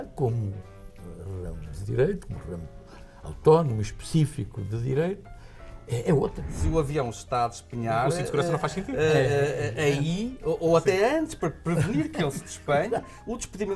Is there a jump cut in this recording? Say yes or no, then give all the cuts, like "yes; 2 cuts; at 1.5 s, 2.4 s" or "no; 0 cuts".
yes; 1 cut; at 6.5 s